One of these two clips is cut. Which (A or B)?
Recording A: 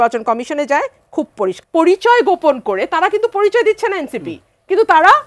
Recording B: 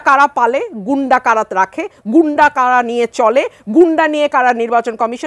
A